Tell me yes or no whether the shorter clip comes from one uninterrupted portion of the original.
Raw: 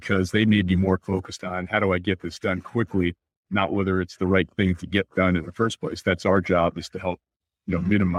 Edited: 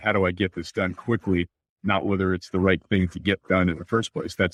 yes